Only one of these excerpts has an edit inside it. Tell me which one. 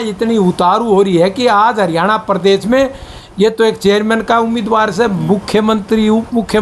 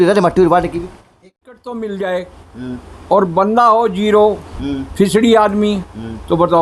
second; 1 cut; at 1.2 s

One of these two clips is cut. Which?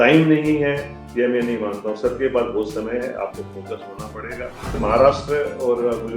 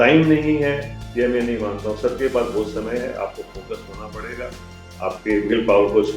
first; 1 cut; at 4.8 s

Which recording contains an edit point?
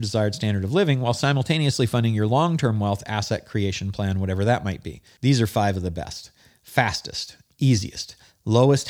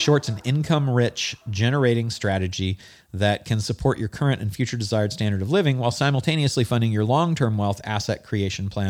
first; 1 cut; at 5.0 s

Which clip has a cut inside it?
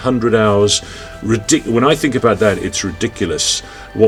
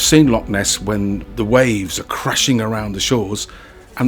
second; 1 cut; at 1.2 s

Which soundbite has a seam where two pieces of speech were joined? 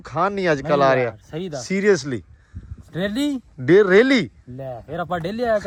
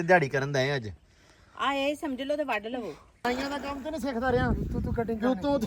second; 1 cut; at 3.3 s

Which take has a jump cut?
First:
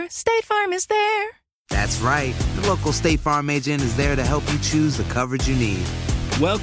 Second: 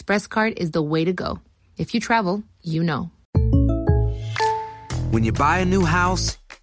second; 1 cut; at 3.2 s

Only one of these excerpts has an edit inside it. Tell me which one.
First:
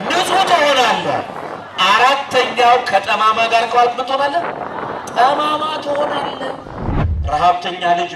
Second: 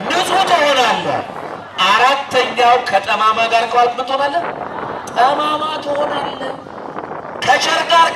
first; 1 cut; at 6.9 s

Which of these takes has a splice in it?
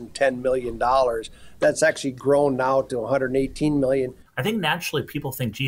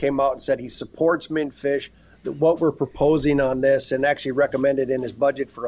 first; 1 cut; at 4.2 s

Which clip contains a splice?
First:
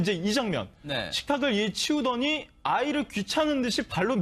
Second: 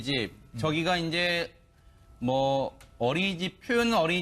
second; 1 cut; at 1.1 s

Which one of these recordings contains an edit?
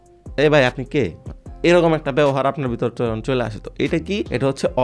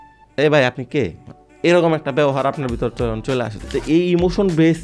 second; 1 cut; at 3.7 s

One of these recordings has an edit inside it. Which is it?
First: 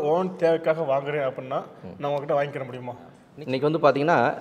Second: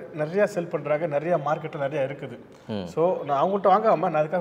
first; 1 cut; at 3.2 s

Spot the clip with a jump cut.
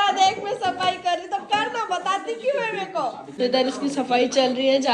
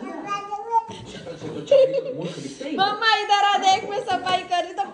first; 1 cut; at 3.3 s

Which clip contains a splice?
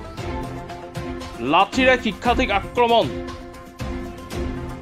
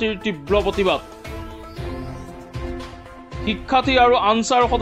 first; 2 cuts; at 1.3 s, 3.1 s

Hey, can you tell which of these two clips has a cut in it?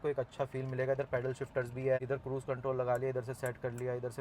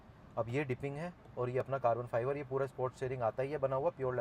first; 1 cut; at 2.0 s

